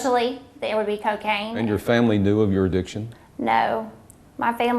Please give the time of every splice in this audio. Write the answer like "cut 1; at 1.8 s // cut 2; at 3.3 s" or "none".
cut 1; at 1.5 s